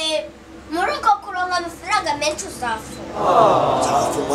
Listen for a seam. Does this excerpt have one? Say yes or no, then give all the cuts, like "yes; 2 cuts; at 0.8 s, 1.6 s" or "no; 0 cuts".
no; 0 cuts